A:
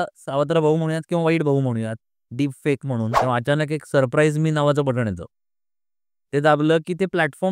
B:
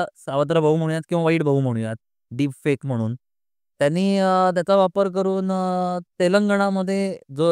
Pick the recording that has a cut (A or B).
A